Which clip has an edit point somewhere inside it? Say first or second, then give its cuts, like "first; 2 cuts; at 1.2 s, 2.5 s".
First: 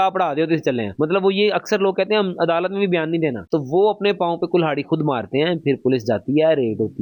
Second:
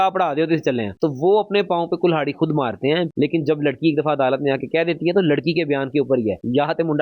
second; 2 cuts; at 0.9 s, 3.1 s